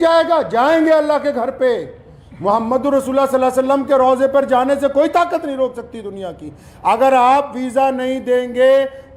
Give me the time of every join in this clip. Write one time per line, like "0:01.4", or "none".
none